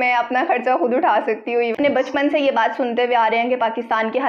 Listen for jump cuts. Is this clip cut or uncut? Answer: cut